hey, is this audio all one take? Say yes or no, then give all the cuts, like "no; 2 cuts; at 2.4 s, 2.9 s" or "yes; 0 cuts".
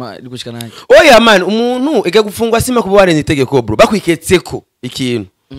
yes; 0 cuts